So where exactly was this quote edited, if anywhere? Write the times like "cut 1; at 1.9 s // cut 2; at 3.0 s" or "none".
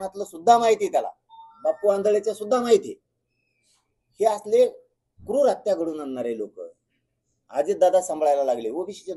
none